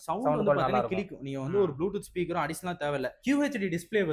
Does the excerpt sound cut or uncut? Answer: uncut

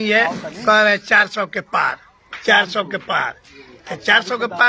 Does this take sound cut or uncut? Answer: uncut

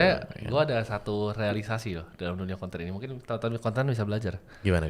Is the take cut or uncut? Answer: uncut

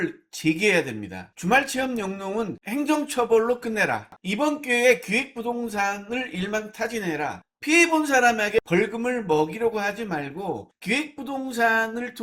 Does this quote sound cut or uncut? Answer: cut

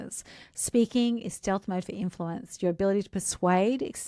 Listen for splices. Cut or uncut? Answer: uncut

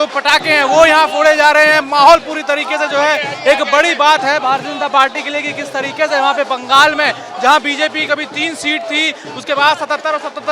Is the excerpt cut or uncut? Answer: uncut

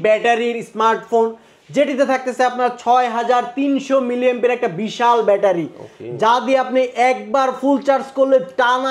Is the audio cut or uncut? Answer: uncut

